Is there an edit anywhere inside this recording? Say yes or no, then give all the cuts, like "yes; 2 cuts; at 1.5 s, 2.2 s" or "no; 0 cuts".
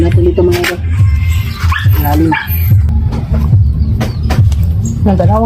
yes; 1 cut; at 2.8 s